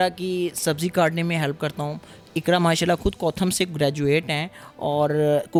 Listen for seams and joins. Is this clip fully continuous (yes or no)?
yes